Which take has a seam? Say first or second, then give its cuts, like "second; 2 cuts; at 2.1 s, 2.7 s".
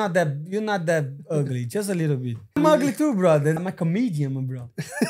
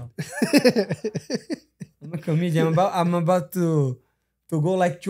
first; 2 cuts; at 2.6 s, 3.6 s